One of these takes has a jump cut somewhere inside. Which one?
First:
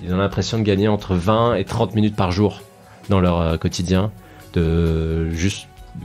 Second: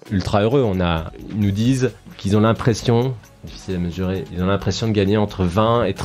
second; 2 cuts; at 1.1 s, 2.1 s

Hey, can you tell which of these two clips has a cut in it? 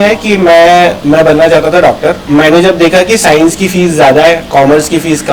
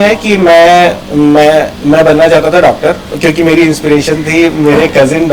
first; 2 cuts; at 1.0 s, 2.2 s

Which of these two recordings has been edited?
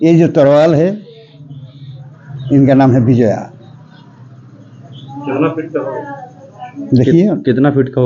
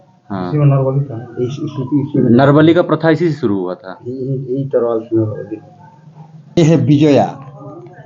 second; 1 cut; at 6.6 s

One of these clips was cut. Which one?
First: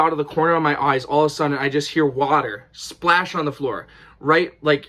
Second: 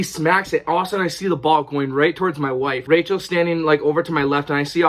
second; 1 cut; at 2.8 s

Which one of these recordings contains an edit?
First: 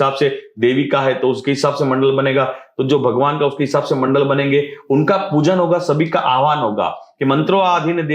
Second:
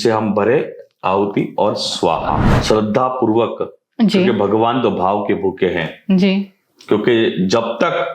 second; 1 cut; at 2.5 s

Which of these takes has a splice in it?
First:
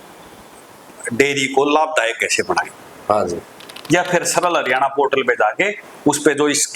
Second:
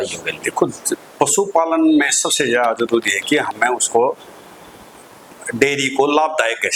first; 1 cut; at 3.5 s

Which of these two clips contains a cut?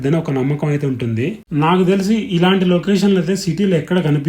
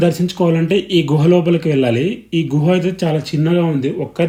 first; 1 cut; at 1.4 s

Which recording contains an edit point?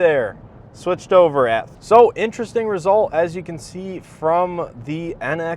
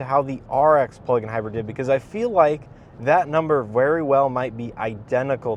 first; 1 cut; at 1.7 s

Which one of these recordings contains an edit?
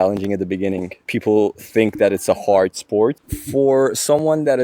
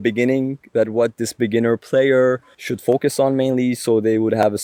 first; 1 cut; at 3.3 s

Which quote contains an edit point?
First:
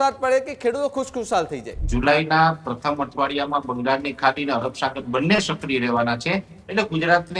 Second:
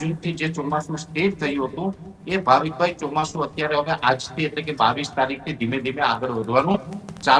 first; 1 cut; at 1.9 s

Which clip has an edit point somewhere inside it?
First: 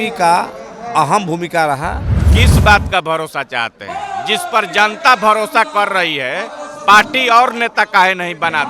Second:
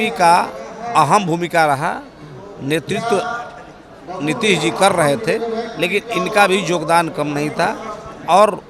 first; 1 cut; at 2.2 s

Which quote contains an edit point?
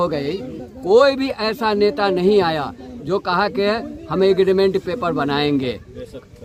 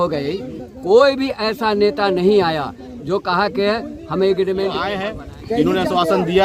second; 1 cut; at 4.9 s

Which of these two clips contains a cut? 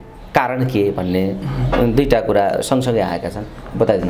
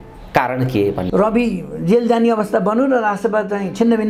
second; 1 cut; at 1.0 s

